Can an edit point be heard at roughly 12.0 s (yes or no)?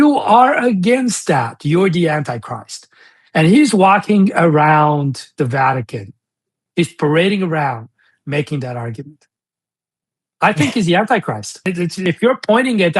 yes